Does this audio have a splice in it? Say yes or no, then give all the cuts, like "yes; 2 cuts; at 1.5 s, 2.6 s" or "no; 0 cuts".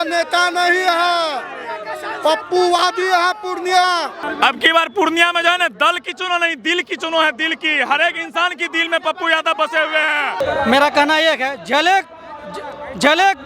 yes; 2 cuts; at 4.2 s, 10.4 s